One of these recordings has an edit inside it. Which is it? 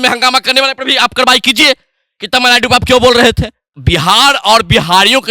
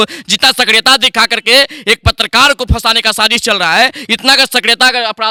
first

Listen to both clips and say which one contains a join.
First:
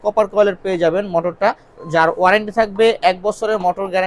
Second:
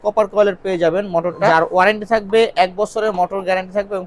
second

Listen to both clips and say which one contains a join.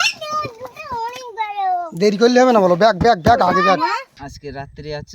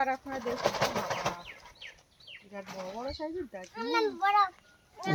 first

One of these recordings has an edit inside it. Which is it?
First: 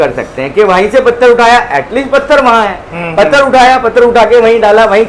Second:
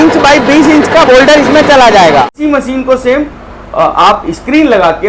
second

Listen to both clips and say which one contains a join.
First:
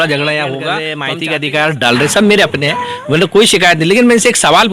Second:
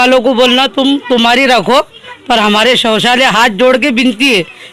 first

